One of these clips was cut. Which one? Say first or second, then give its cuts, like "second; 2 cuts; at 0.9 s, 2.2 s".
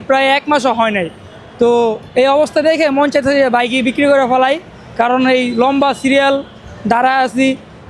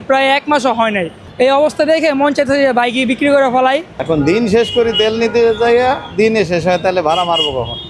second; 2 cuts; at 1.3 s, 3.9 s